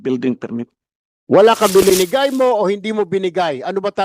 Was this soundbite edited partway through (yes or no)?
yes